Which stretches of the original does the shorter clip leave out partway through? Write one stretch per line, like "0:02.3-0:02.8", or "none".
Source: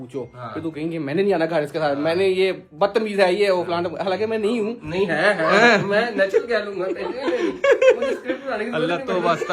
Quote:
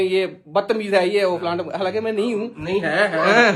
none

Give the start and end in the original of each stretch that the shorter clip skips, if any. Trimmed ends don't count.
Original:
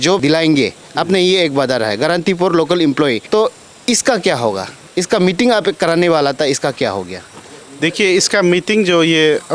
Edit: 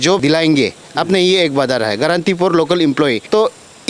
none

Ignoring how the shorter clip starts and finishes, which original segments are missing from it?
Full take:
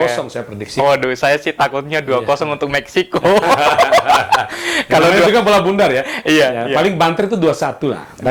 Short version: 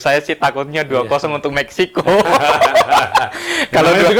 none

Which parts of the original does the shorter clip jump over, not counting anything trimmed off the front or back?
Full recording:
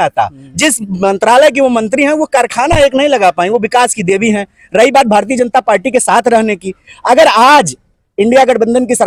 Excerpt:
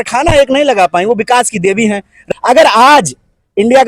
0:04.6-0:06.7

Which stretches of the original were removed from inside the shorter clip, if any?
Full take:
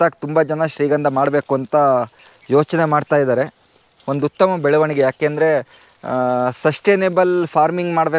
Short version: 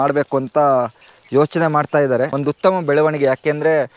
0:03.5-0:04.1

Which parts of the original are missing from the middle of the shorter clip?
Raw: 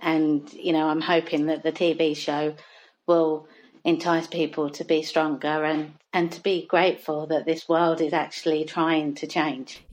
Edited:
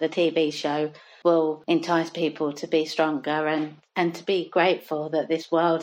0:02.7-0:02.9
0:03.4-0:03.8

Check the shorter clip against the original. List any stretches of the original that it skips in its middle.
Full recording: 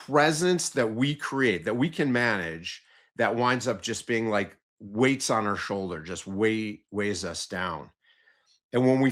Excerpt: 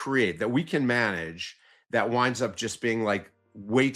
none

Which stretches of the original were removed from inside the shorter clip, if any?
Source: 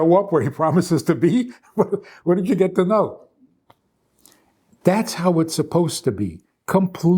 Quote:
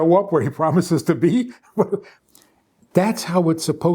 0:02.1-0:04.0

